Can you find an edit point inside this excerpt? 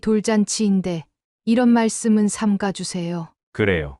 no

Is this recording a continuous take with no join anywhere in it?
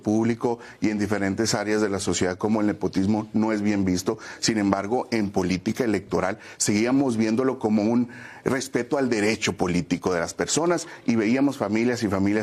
yes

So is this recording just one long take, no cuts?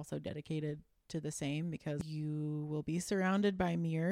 no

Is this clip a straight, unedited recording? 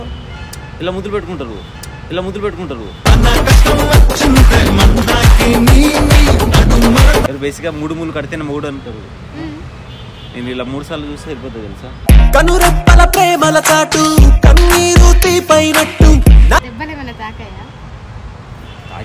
no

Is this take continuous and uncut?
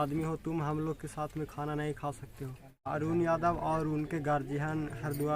no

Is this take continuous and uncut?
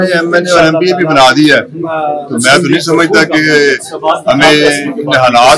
yes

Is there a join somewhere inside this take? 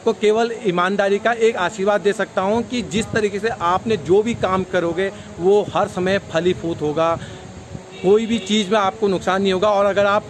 no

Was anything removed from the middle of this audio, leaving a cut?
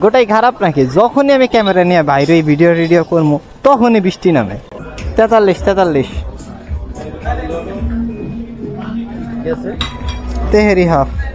no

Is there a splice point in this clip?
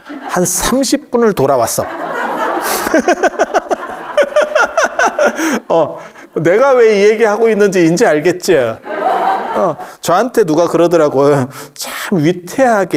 no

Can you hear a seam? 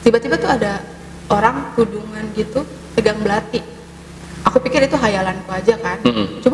no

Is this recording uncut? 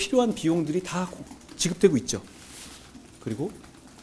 yes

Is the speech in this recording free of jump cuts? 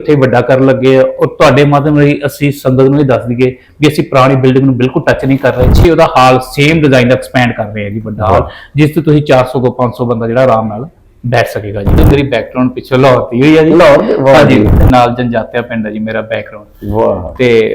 no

